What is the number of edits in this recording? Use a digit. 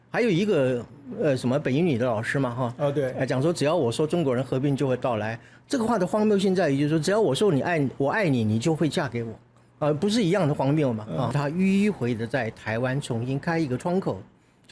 1